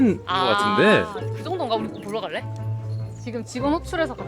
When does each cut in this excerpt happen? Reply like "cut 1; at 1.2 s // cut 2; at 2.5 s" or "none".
cut 1; at 3.2 s